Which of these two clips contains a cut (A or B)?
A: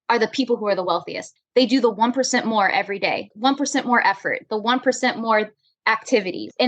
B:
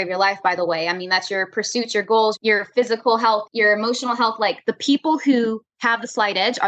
A